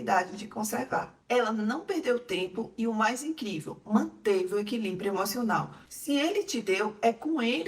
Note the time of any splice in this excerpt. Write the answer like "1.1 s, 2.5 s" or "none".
1.1 s, 5.8 s